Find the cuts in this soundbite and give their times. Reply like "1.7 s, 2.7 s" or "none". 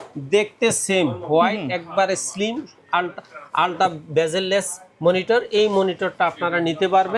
none